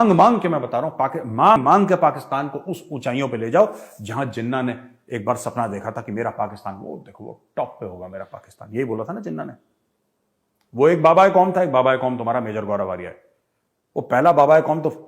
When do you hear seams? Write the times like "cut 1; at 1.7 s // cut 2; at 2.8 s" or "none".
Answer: cut 1; at 1.6 s